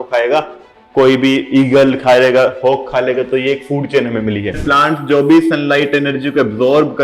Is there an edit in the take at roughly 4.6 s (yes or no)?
yes